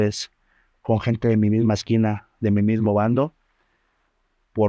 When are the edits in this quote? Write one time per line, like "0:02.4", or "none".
none